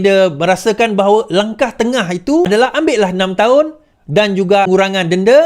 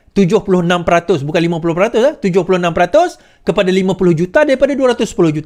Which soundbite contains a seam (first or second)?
first